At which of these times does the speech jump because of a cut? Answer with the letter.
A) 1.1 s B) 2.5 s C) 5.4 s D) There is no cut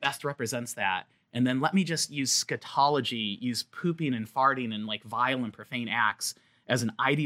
D